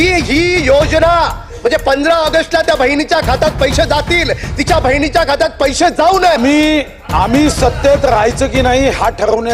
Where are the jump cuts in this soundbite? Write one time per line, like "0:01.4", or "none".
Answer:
0:06.4